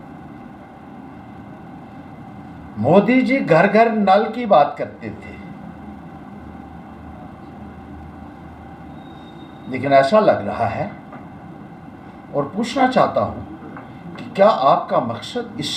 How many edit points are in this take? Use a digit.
0